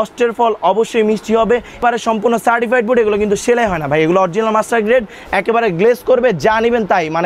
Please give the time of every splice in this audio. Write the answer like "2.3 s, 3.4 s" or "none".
1.8 s